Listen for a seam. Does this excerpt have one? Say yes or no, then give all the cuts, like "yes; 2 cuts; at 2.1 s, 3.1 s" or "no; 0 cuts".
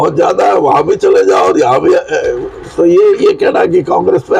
no; 0 cuts